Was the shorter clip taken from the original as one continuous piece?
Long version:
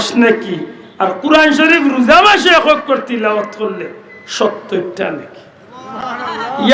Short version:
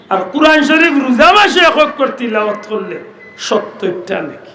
yes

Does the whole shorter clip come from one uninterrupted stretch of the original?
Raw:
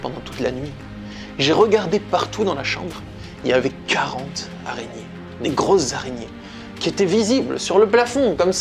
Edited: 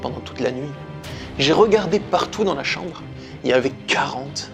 yes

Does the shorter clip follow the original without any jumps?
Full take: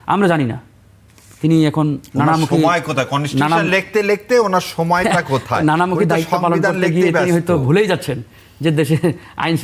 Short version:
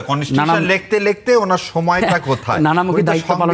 yes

